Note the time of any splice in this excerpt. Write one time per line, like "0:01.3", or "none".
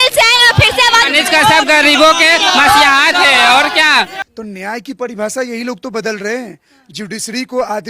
0:04.2